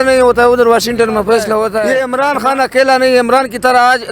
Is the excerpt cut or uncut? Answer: cut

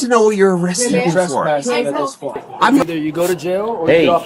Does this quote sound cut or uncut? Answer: cut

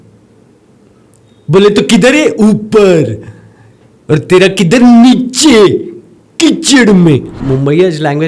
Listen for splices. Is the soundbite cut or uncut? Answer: cut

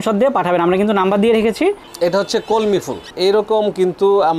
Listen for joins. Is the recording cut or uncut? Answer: cut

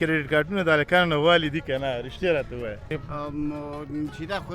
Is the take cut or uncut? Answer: cut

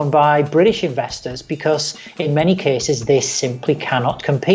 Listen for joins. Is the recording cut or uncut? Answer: uncut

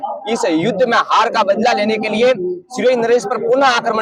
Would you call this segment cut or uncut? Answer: uncut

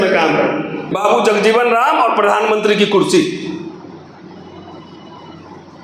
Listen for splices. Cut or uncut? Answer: cut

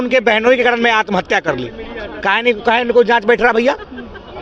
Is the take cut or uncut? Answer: uncut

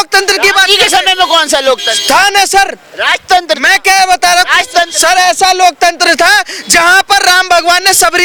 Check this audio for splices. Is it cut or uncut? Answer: uncut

